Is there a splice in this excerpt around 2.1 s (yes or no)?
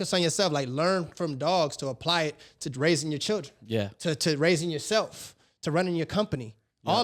no